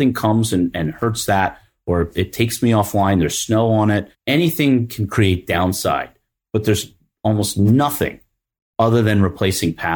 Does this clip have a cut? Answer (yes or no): yes